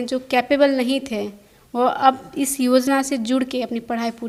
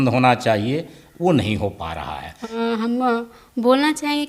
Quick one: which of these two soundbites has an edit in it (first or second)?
second